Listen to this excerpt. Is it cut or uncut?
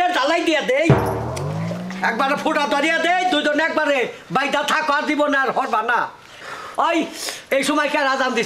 cut